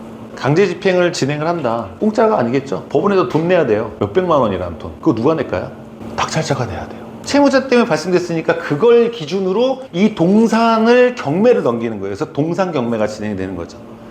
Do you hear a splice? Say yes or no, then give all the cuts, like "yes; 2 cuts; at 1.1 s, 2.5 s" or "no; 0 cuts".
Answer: yes; 6 cuts; at 1.9 s, 2.8 s, 3.9 s, 4.8 s, 7.1 s, 9.8 s